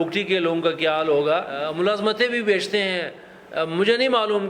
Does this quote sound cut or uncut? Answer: cut